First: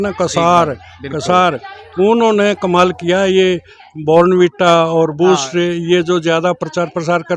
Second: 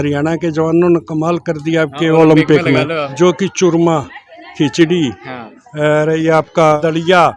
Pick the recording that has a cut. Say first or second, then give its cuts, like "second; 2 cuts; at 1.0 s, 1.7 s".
second; 1 cut; at 3.0 s